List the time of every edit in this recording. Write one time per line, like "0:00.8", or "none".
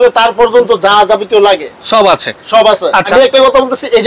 0:03.1

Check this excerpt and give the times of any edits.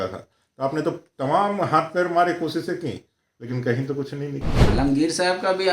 0:04.6

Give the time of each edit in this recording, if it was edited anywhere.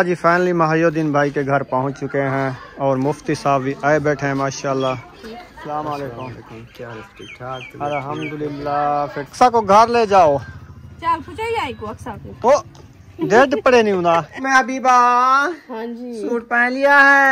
0:05.1
0:09.3
0:14.4

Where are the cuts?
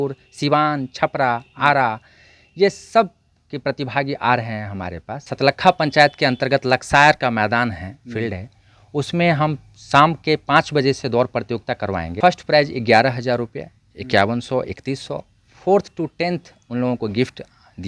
0:05.3
0:12.1

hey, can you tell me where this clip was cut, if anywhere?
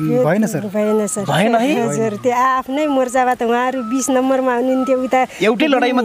none

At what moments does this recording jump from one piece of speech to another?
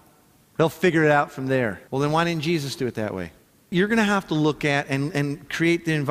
0:01.8
0:03.7

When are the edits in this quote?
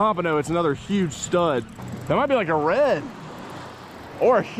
0:01.8

